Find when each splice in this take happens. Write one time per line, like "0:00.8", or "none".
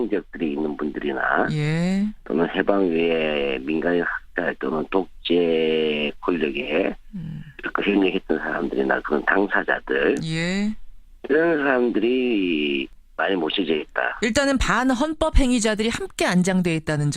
none